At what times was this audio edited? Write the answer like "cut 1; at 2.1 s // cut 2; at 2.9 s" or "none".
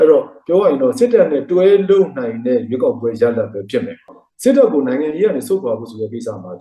cut 1; at 4.1 s